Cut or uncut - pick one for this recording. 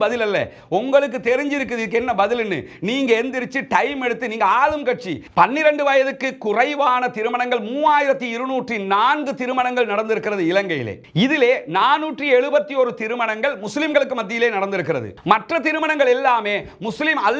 cut